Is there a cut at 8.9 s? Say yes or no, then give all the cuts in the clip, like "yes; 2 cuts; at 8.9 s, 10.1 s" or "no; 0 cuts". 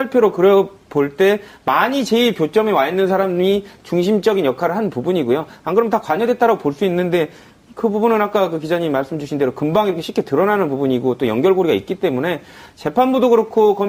no; 0 cuts